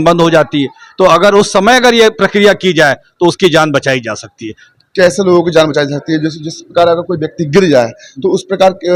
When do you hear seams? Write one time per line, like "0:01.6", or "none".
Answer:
none